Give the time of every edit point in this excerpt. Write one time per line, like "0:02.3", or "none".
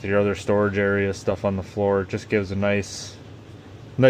none